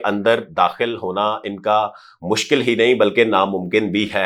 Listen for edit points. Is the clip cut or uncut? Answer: uncut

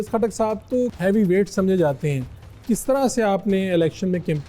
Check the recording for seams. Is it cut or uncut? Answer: cut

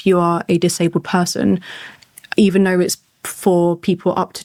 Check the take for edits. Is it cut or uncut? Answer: uncut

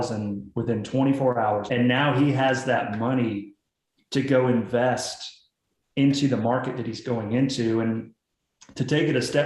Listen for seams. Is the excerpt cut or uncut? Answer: cut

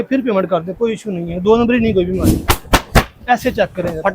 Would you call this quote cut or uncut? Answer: cut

